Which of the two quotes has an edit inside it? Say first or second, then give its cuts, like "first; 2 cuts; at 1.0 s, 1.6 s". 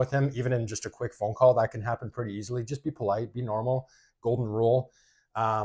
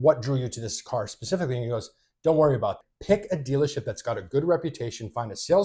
second; 1 cut; at 2.8 s